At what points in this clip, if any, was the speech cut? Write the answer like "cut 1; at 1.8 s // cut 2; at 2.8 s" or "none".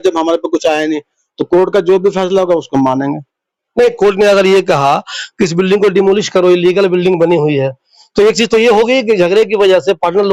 none